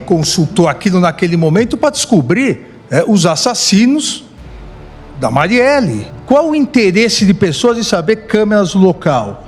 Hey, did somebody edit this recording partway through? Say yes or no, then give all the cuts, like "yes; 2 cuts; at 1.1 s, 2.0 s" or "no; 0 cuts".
yes; 1 cut; at 6.1 s